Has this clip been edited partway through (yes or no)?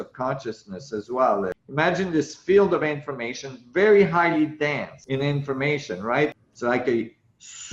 yes